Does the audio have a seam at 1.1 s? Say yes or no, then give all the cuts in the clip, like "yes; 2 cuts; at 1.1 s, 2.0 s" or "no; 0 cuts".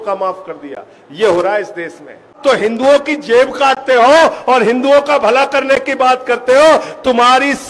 no; 1 cut; at 2.3 s